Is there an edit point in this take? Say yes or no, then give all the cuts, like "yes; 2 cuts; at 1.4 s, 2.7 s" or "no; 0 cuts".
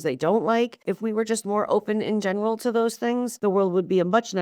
yes; 2 cuts; at 0.8 s, 3.4 s